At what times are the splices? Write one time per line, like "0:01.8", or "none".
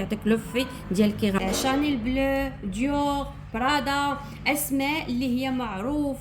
0:01.4